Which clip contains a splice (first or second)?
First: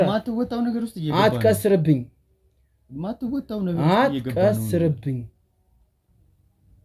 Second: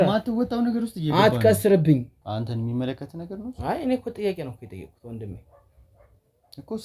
second